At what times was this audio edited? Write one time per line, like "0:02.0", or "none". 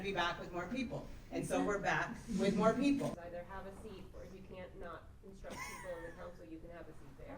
0:03.2